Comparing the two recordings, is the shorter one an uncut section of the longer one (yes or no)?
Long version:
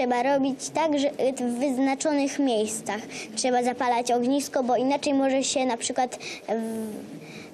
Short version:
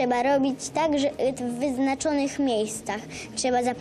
yes